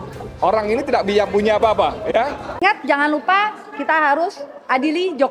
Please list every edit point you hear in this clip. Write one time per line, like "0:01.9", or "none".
0:02.5